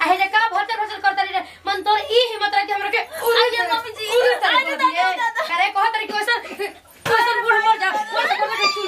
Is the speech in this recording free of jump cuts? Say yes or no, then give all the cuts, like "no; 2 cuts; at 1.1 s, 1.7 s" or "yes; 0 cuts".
yes; 0 cuts